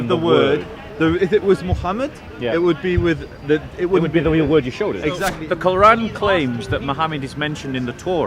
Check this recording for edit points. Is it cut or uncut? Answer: cut